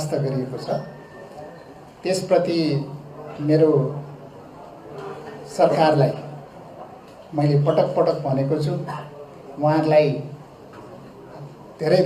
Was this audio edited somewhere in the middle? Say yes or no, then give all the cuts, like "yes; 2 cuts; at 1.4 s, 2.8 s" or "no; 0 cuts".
no; 0 cuts